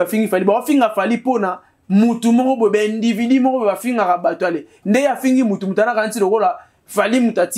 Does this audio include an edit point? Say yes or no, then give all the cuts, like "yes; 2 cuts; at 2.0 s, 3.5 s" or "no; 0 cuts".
no; 0 cuts